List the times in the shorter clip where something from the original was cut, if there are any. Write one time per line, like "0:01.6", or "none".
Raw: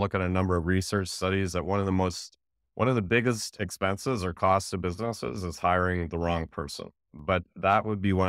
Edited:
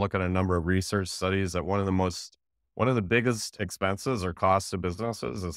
none